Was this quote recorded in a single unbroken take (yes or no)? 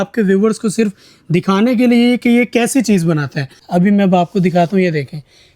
no